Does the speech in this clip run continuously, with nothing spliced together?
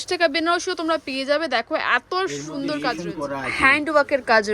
no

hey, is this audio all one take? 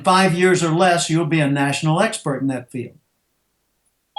yes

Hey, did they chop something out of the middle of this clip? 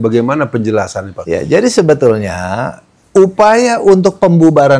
yes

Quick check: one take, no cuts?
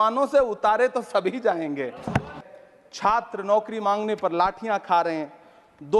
no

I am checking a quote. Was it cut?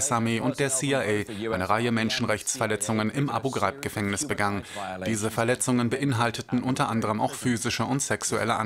yes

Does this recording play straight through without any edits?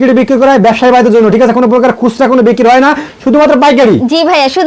yes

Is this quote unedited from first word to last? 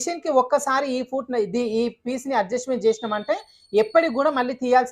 yes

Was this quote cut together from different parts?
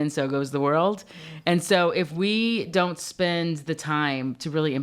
no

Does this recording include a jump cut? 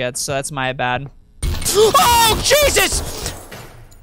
no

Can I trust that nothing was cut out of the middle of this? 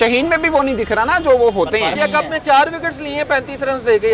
no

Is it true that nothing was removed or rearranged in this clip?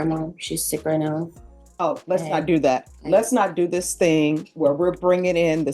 yes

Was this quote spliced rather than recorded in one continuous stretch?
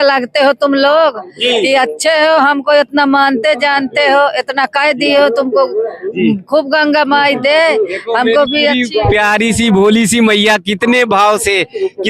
no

